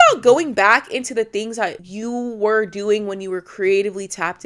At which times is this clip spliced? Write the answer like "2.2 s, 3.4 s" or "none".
1.9 s